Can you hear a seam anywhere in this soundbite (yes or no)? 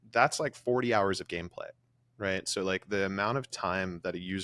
no